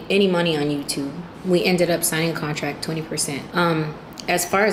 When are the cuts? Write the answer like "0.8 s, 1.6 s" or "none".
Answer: 1.3 s, 3.2 s